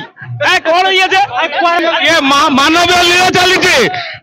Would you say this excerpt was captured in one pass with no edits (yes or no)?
no